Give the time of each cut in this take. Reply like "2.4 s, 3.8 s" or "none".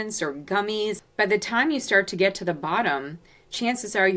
1.0 s